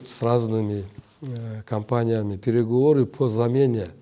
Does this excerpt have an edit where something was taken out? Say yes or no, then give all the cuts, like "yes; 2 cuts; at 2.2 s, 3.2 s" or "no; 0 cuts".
no; 0 cuts